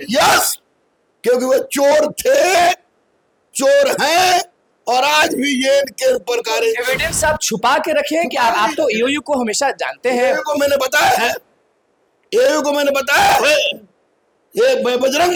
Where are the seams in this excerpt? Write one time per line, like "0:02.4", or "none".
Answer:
none